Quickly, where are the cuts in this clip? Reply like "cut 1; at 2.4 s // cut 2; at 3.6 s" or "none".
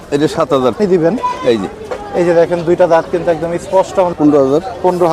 cut 1; at 0.8 s // cut 2; at 4.1 s